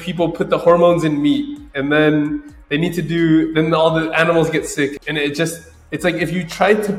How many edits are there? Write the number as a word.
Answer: zero